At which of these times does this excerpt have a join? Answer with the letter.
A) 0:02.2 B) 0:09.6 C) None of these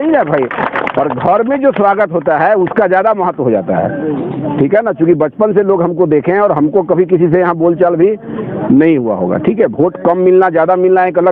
C